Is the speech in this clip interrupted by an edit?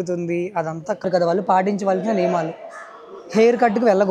yes; 1 cut; at 1.1 s

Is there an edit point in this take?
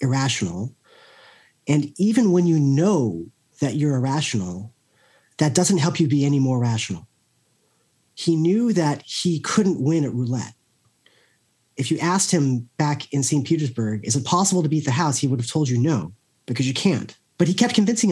yes; 1 cut; at 17.2 s

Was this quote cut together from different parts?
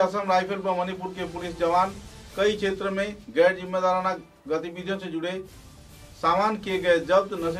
no; 0 cuts

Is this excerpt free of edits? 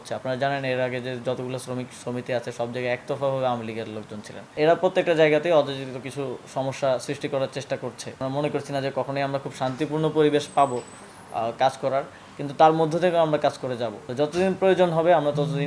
no; 3 cuts; at 4.5 s, 8.2 s, 14.0 s

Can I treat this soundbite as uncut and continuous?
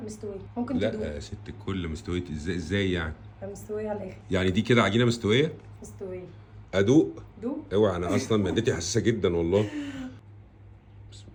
yes; 0 cuts

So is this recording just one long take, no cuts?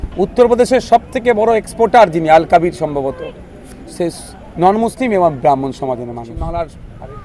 no; 1 cut; at 6.3 s

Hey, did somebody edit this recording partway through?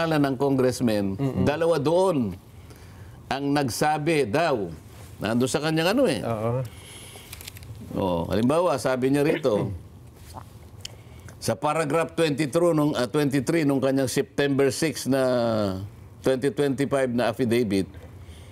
no; 0 cuts

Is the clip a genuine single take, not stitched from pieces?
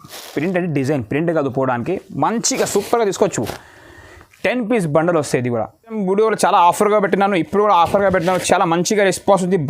no; 1 cut; at 6.0 s

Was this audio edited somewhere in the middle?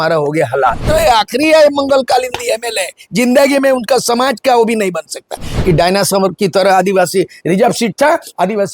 yes; 2 cuts; at 0.8 s, 5.5 s

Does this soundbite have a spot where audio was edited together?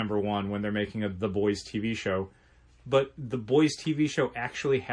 no; 0 cuts

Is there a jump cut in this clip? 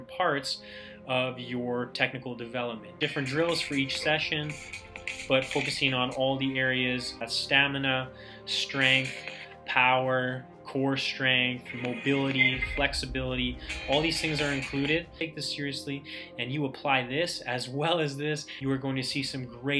yes; 4 cuts; at 3.0 s, 7.3 s, 15.1 s, 18.5 s

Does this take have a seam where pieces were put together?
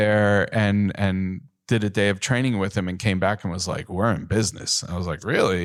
no; 0 cuts

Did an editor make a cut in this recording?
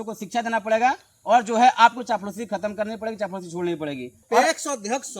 yes; 1 cut; at 4.2 s

